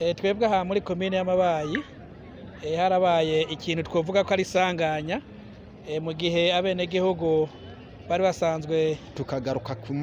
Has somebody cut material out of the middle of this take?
yes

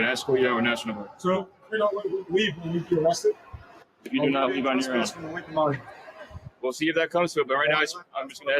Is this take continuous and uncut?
no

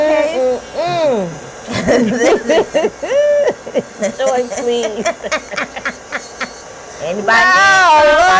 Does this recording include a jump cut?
no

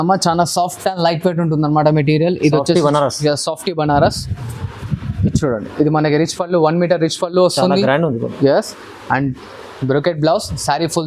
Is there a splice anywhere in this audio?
no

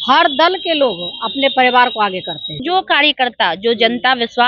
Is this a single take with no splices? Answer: no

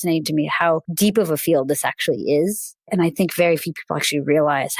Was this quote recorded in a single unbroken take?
no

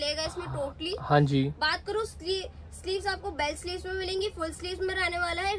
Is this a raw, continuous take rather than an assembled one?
yes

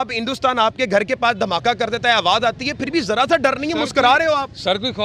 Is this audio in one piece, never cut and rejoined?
yes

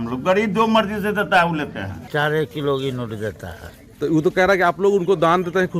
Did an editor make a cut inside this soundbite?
yes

